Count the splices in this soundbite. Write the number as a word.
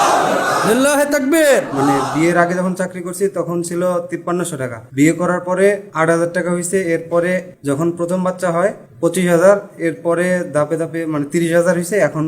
five